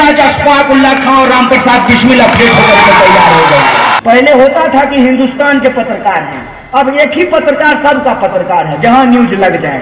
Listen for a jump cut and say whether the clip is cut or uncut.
cut